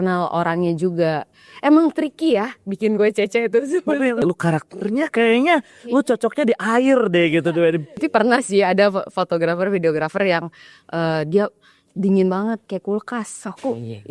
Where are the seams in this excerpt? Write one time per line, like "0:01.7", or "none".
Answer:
0:04.2
0:08.0